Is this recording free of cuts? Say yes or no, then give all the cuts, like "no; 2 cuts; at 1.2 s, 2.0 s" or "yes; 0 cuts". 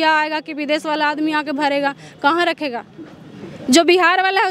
yes; 0 cuts